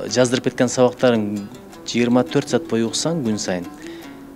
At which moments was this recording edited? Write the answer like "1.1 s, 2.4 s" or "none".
none